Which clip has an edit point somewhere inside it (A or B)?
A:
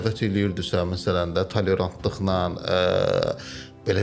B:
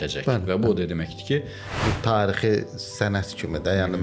B